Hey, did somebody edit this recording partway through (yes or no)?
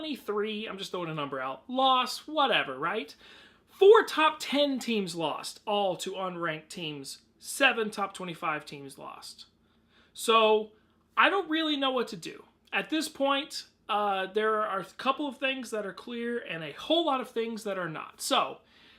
yes